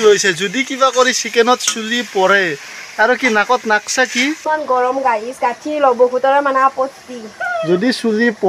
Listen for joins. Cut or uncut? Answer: uncut